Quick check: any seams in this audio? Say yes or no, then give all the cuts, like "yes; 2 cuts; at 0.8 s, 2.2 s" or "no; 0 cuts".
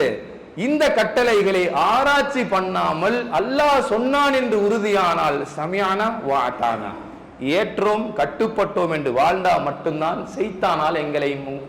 no; 0 cuts